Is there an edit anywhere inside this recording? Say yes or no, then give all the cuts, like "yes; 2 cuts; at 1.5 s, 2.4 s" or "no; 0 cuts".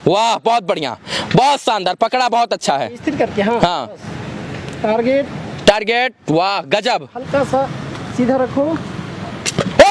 no; 0 cuts